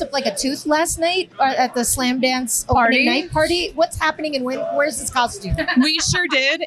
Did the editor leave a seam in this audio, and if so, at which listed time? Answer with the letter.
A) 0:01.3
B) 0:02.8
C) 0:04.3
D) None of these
A